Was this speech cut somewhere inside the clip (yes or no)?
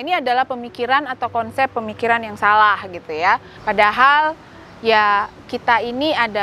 yes